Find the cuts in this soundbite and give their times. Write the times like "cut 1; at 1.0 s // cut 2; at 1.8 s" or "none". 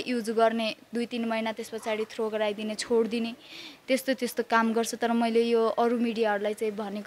none